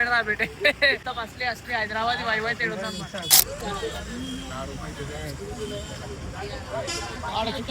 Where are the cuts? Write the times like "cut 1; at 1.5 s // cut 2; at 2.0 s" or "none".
cut 1; at 3.4 s

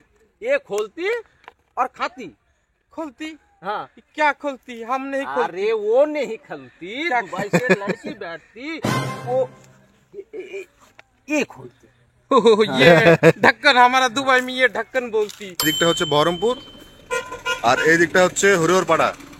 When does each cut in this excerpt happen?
cut 1; at 15.6 s

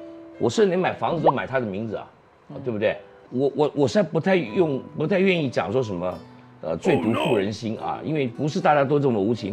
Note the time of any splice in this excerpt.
cut 1; at 3.1 s

